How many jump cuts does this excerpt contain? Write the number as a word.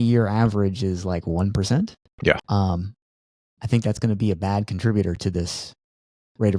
zero